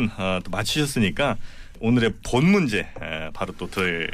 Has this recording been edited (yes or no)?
no